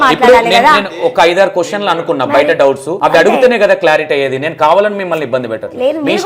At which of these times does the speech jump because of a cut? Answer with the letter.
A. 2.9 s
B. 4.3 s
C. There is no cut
A